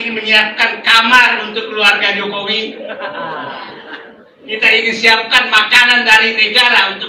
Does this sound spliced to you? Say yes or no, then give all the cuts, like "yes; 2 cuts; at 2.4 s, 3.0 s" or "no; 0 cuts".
no; 0 cuts